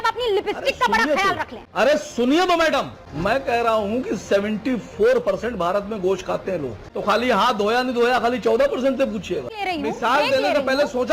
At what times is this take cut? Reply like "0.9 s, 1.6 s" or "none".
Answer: 6.8 s, 9.5 s